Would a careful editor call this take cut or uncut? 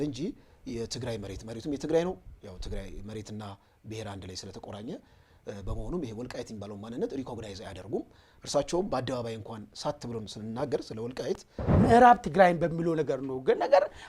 cut